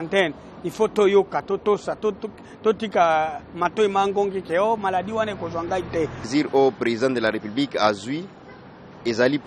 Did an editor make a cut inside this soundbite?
yes; 1 cut; at 6.3 s

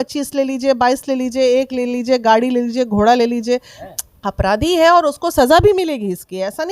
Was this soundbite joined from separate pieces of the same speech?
yes; 1 cut; at 3.8 s

